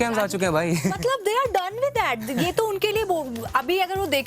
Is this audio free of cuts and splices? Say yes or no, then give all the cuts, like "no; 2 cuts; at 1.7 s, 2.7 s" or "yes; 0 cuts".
yes; 0 cuts